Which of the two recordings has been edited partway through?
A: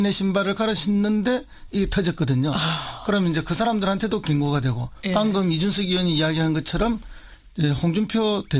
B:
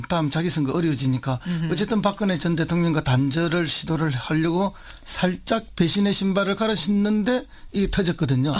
B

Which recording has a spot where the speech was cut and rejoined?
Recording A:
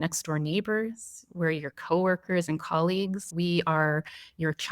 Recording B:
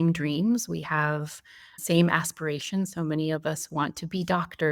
A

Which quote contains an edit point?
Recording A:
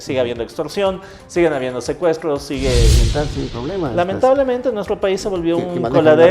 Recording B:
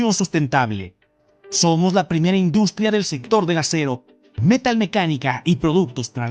A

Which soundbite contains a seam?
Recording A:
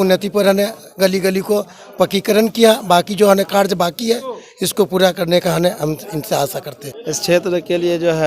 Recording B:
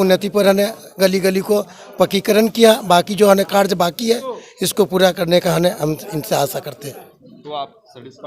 A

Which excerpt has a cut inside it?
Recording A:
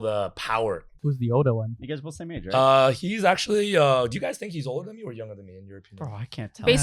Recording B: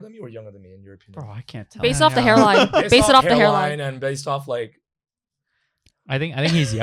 A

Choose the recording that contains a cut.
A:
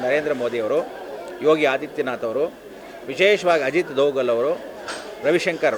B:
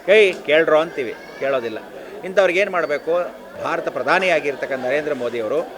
B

